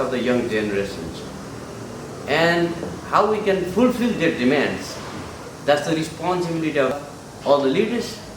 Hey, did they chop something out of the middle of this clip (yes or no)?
yes